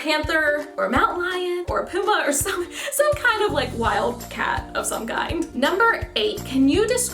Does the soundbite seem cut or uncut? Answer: cut